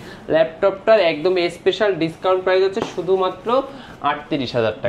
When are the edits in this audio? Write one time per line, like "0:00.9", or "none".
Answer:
none